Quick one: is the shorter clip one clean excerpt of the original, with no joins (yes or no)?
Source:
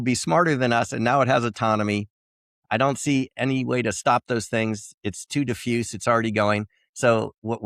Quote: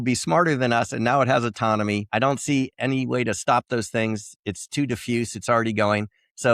no